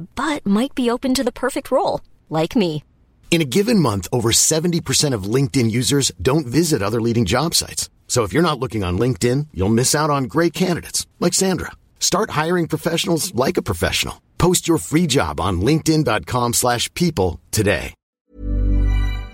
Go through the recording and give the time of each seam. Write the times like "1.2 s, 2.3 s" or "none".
18.1 s